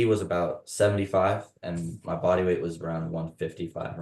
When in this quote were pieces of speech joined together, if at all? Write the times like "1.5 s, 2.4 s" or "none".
none

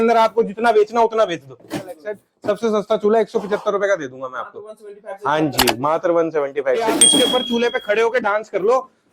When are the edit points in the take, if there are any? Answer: 2.1 s, 6.9 s

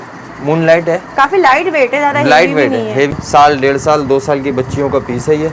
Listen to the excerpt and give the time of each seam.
3.2 s

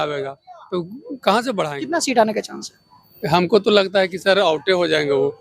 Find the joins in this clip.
1.8 s

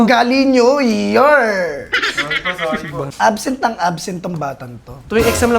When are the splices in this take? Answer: 3.1 s

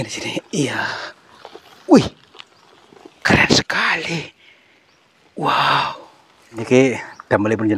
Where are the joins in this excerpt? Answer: 6.6 s

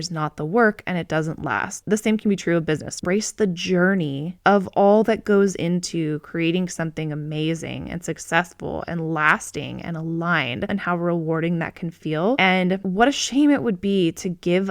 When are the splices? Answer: 3.0 s, 10.7 s, 12.6 s

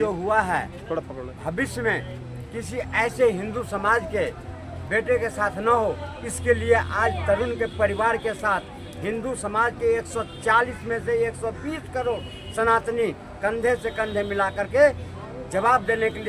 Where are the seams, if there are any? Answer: none

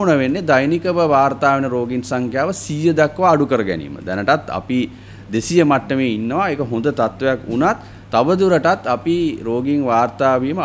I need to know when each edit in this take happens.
none

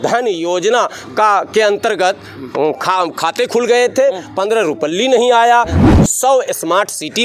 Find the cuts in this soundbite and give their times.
5.8 s

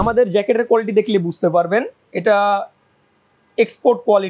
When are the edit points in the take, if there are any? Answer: none

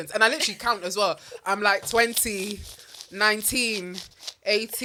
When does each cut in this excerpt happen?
none

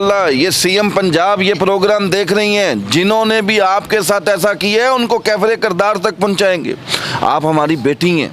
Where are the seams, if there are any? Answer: none

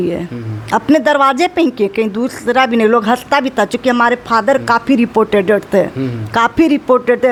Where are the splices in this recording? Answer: none

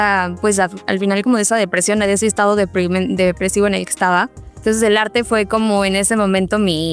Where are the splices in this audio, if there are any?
4.6 s

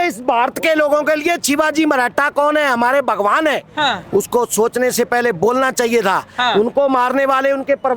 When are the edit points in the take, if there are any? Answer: none

